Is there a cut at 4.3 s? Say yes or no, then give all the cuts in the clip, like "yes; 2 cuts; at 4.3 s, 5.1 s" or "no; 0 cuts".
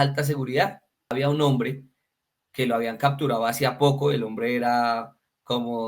no; 1 cut; at 1.1 s